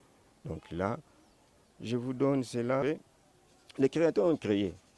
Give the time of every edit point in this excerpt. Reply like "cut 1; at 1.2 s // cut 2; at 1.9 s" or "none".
cut 1; at 2.8 s